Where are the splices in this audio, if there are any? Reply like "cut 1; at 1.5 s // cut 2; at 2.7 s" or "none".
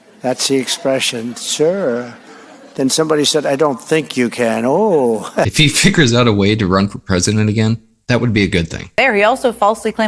cut 1; at 5.5 s // cut 2; at 7.9 s // cut 3; at 8.9 s